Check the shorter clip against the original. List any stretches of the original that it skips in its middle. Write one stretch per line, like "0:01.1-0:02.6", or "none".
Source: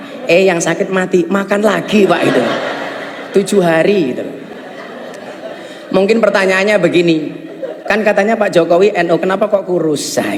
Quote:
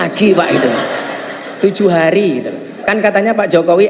0:04.4-0:07.7